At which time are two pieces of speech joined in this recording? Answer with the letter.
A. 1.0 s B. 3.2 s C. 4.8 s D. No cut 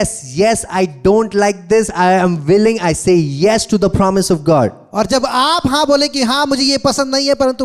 D